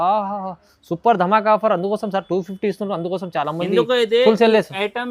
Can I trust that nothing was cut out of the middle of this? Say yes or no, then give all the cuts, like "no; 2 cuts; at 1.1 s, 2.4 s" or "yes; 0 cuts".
yes; 0 cuts